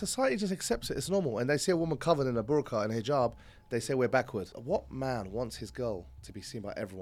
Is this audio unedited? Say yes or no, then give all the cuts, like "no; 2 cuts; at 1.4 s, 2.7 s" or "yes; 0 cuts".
no; 1 cut; at 4.5 s